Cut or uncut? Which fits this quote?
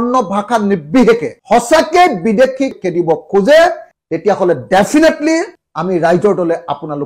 uncut